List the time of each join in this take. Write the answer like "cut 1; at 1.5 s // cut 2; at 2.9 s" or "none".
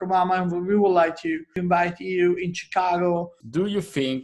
cut 1; at 1.5 s // cut 2; at 3.4 s